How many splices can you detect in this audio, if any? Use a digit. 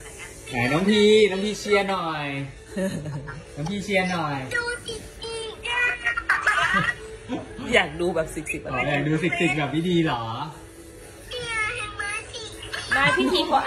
0